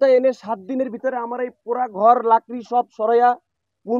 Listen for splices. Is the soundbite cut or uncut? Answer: uncut